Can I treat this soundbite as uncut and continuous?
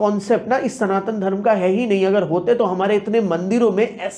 yes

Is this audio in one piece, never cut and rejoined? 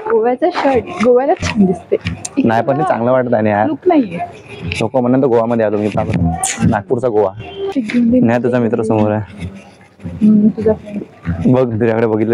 no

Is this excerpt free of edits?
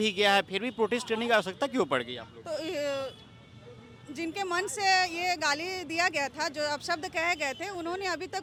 yes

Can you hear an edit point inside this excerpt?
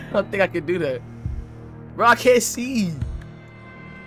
no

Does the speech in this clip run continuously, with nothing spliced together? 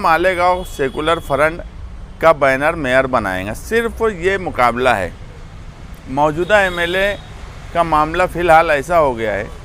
yes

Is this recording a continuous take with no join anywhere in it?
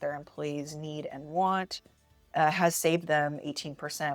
yes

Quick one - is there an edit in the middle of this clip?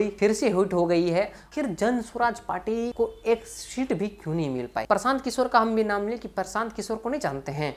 yes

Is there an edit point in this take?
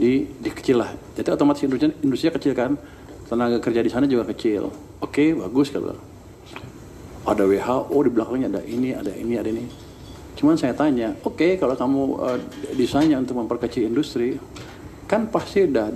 no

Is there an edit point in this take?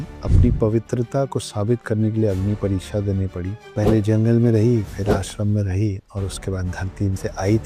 no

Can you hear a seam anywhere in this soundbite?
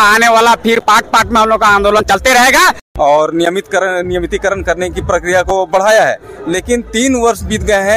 yes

